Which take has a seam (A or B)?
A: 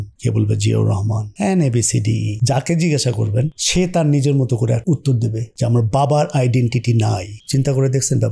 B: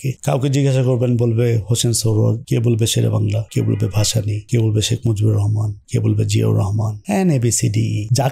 A